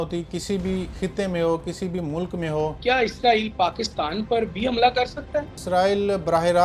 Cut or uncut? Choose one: cut